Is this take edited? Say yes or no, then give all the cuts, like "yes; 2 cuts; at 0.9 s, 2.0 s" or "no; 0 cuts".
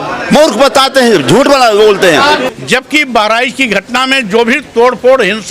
yes; 1 cut; at 2.5 s